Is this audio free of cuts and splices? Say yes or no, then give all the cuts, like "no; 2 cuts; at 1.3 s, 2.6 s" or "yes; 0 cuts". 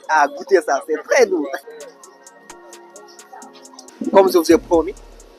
no; 2 cuts; at 1.6 s, 3.9 s